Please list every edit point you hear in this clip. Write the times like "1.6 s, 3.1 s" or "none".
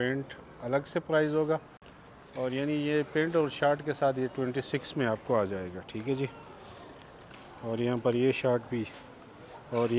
none